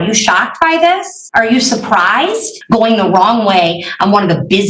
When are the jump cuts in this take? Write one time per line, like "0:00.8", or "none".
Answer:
0:01.2
0:02.5

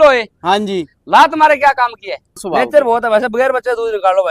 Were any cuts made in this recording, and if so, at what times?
0:02.4

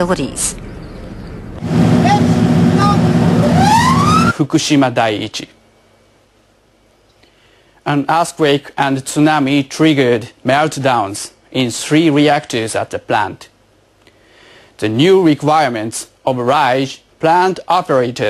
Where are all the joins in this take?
none

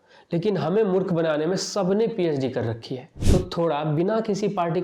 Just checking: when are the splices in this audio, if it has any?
0:03.1

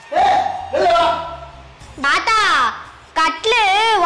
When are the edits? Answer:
0:02.1

